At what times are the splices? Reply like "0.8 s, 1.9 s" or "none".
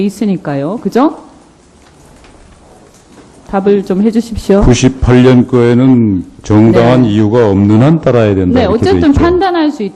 4.3 s

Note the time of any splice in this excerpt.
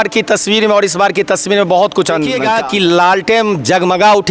2.4 s

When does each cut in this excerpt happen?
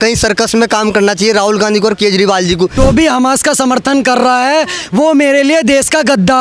2.7 s

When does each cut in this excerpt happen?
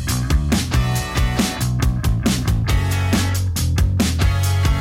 1.5 s

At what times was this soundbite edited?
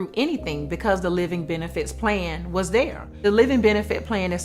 3.0 s

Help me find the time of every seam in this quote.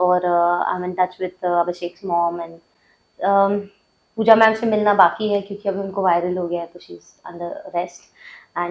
none

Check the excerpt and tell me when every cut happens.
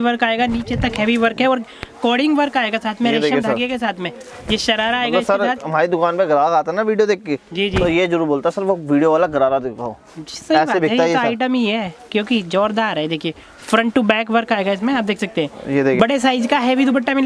16.0 s

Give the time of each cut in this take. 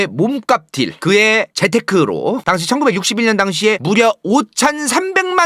2.4 s

